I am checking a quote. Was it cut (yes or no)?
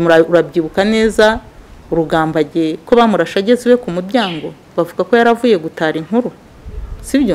no